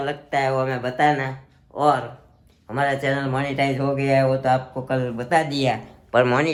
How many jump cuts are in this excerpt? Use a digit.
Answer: 0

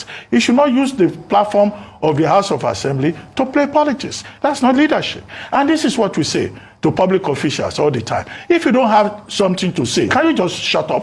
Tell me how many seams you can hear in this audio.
1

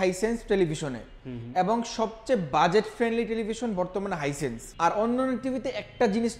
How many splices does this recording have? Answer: 1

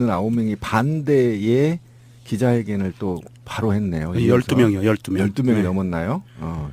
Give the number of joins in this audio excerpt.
1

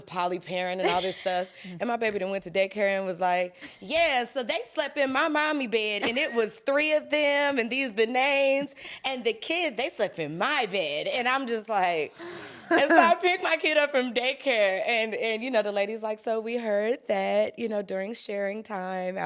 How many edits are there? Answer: 0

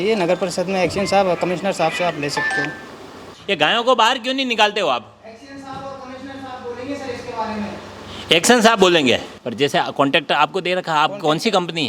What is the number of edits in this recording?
2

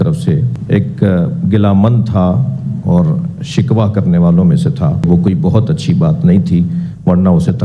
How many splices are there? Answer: 1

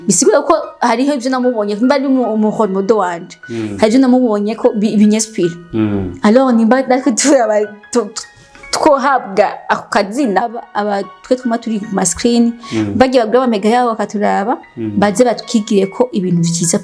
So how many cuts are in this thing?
1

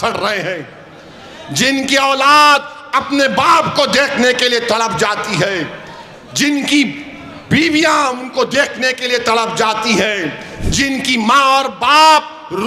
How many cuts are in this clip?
0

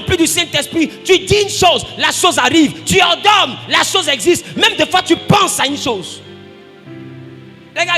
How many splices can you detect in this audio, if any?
0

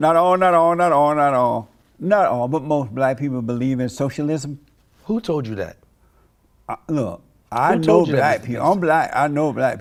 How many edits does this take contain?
0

